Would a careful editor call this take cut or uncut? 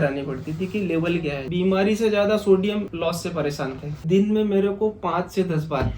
cut